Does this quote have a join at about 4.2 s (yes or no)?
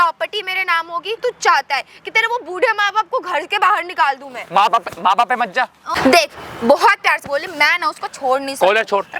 no